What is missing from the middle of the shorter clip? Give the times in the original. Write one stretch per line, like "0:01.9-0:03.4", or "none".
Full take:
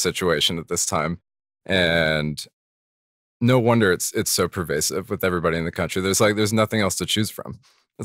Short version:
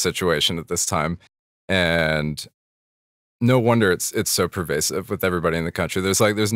none